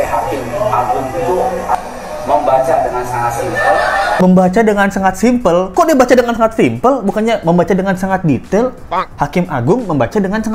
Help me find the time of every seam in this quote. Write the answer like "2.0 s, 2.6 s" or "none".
1.8 s, 4.2 s